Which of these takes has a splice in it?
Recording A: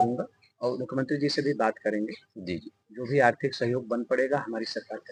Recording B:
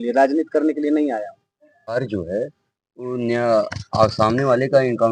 B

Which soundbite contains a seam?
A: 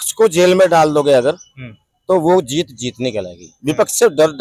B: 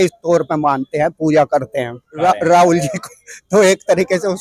B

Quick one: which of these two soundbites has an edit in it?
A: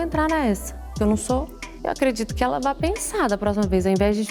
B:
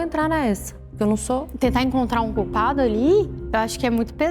B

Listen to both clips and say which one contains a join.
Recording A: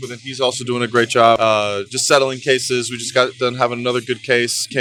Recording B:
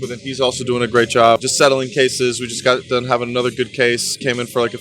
B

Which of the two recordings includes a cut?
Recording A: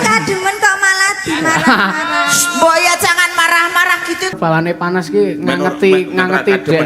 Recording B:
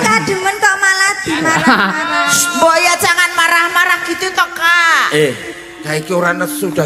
A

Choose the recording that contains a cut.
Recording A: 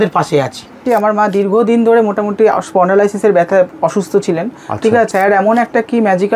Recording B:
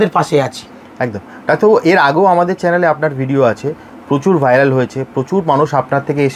A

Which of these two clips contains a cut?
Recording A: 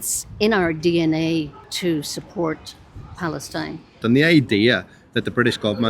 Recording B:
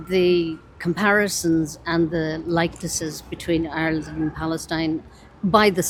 A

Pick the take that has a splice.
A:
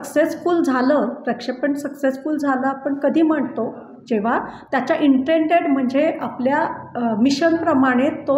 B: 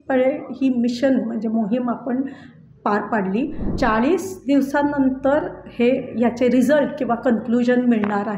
B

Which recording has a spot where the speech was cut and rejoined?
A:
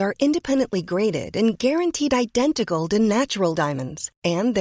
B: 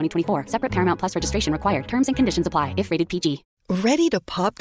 B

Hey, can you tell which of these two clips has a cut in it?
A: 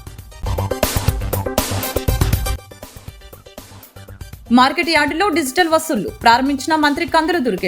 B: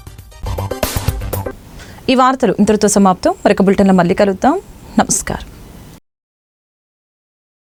A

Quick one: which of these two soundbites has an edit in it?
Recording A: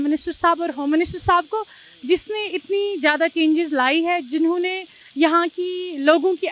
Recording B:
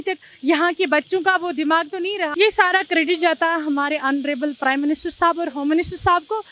B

